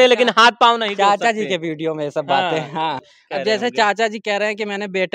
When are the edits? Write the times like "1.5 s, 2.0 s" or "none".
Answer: 3.1 s